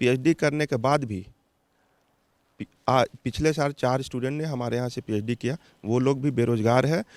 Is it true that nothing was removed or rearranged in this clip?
yes; 0 cuts

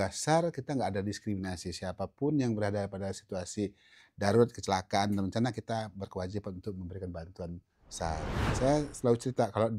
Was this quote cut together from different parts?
yes; 1 cut; at 8.4 s

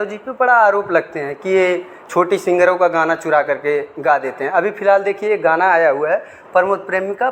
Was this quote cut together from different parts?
no; 0 cuts

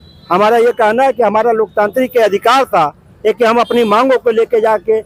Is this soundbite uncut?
yes; 0 cuts

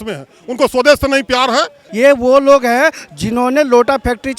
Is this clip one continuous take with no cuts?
no; 1 cut; at 1.8 s

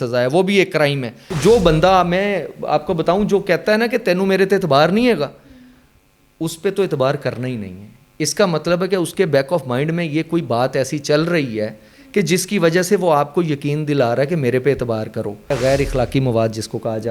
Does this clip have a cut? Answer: yes; 2 cuts; at 1.2 s, 15.5 s

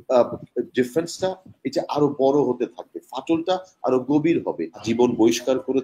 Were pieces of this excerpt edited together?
yes; 1 cut; at 4.8 s

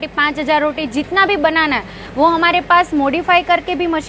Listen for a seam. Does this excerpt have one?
no; 0 cuts

